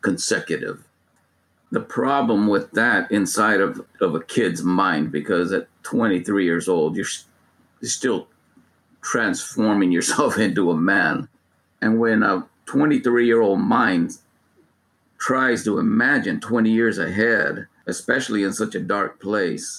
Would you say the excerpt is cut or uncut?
cut